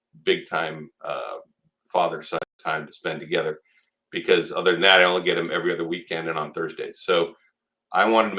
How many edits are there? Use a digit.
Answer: 1